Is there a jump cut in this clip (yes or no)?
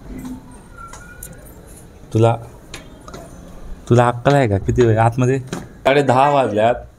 yes